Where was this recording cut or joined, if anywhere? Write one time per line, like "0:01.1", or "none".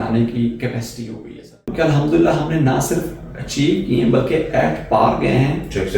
0:01.7